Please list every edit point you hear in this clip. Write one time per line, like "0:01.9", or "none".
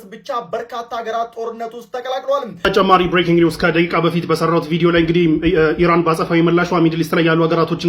0:02.5